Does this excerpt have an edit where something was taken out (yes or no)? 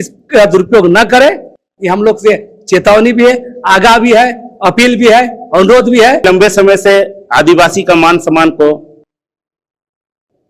yes